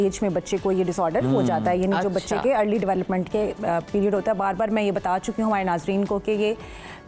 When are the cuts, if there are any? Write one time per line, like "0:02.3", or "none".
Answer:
none

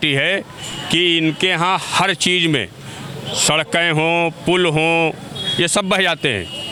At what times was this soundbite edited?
none

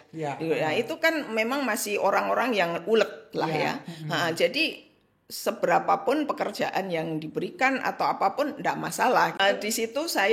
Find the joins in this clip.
0:09.3

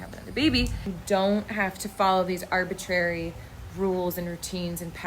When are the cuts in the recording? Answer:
0:00.9

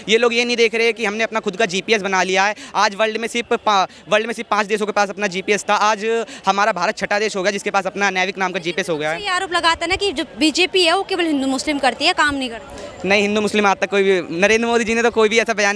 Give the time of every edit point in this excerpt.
none

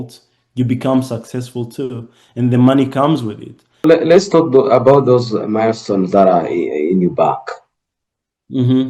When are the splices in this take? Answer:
0:03.8

